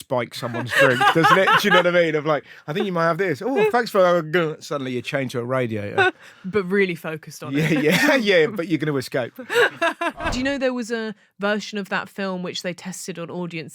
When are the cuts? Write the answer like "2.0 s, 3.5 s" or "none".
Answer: 10.2 s